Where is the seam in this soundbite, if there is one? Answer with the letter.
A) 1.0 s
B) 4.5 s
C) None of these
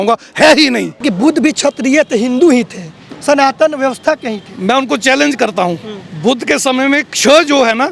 A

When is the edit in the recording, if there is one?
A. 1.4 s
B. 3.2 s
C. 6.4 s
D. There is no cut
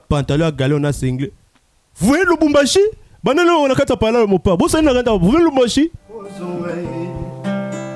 C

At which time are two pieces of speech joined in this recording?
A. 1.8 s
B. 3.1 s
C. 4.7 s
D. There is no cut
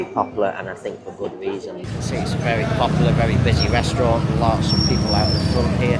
A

